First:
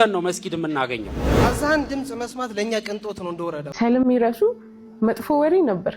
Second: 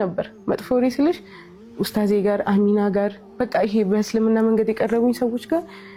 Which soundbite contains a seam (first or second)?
first